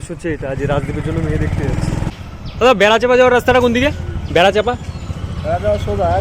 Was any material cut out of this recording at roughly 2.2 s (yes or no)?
yes